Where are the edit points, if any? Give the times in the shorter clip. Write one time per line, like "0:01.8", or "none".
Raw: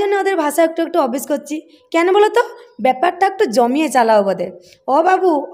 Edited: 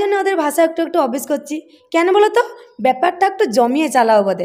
none